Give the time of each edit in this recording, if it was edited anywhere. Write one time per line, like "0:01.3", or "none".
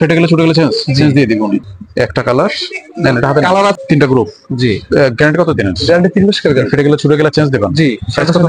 0:01.6
0:03.8